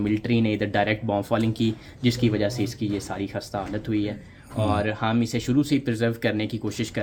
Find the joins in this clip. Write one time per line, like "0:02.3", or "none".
none